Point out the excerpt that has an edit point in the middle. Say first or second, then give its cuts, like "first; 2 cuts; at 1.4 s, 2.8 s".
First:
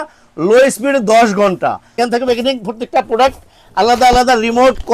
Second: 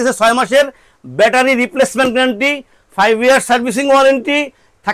first; 1 cut; at 2.0 s